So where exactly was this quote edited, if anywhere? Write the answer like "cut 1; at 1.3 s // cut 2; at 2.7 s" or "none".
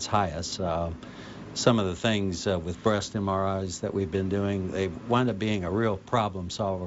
cut 1; at 1.0 s